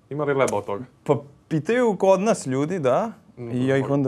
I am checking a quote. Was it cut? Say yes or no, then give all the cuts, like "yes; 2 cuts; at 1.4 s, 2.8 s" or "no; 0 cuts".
no; 0 cuts